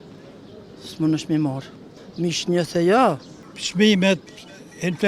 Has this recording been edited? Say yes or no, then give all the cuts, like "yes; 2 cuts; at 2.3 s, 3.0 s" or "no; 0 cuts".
yes; 1 cut; at 3.3 s